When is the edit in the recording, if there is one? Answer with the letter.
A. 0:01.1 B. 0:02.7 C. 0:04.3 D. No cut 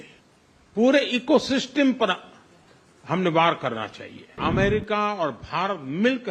C